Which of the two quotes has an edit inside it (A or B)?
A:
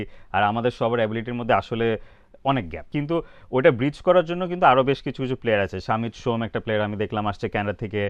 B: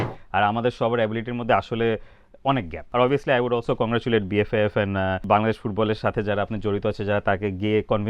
B